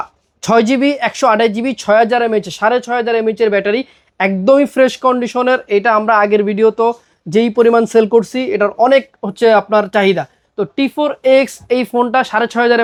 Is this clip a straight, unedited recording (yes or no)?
yes